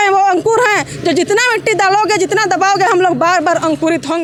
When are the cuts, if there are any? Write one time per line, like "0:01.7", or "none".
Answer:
none